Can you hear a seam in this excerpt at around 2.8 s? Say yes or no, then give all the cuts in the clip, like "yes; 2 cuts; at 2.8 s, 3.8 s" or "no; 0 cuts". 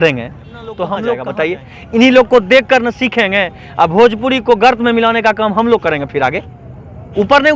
no; 1 cut; at 1.3 s